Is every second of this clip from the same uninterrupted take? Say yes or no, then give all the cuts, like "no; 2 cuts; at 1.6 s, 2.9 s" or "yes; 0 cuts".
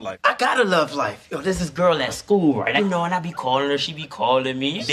yes; 0 cuts